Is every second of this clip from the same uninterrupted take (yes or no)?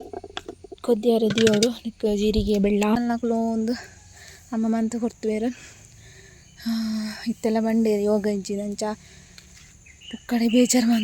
no